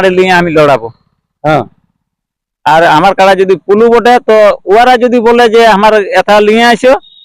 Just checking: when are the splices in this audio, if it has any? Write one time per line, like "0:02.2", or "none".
none